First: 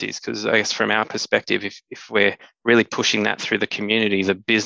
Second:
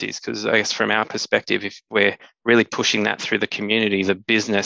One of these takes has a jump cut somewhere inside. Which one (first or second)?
second